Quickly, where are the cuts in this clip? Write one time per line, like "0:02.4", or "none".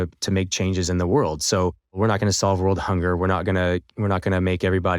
0:02.0

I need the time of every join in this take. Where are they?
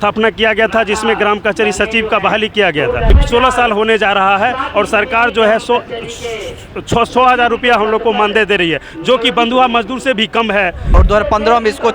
0:03.2
0:11.0

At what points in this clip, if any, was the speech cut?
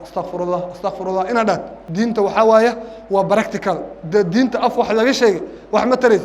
0:01.8

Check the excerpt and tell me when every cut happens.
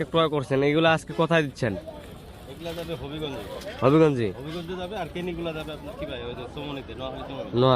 none

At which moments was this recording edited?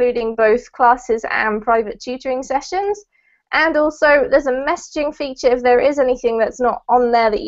none

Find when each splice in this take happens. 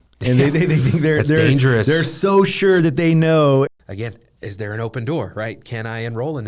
0:03.7

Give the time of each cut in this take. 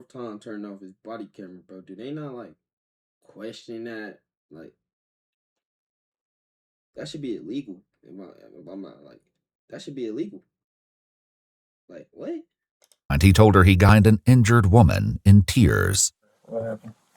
0:13.9

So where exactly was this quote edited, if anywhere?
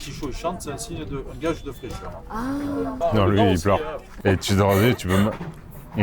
0:03.0
0:04.2

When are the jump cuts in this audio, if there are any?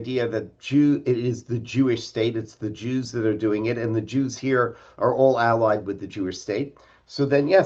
none

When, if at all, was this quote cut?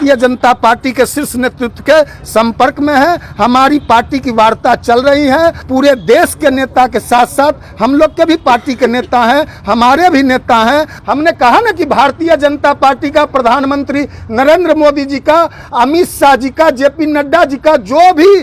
0:05.6
0:10.9

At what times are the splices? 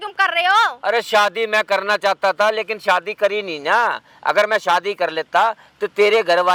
none

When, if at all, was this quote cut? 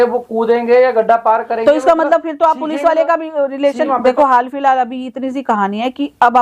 0:03.8

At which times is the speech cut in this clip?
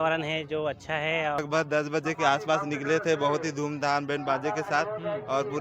0:01.4

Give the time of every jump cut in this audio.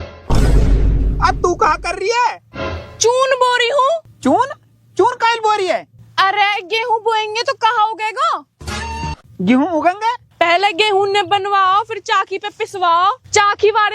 0:04.1
0:10.3

